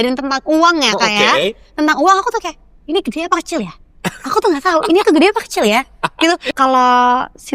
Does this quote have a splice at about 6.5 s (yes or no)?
yes